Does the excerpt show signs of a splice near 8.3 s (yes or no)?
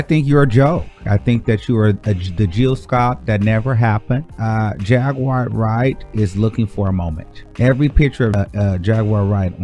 yes